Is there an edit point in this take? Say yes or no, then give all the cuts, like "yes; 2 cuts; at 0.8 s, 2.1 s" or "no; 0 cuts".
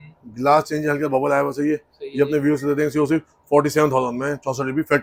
no; 0 cuts